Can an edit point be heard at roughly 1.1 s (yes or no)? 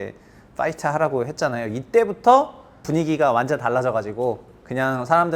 no